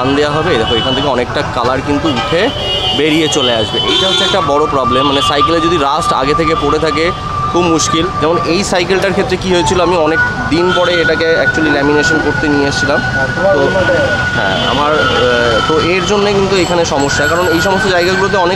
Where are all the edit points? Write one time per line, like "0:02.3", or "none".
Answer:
none